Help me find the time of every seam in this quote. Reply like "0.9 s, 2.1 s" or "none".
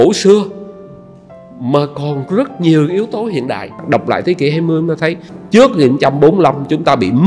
3.8 s, 5.3 s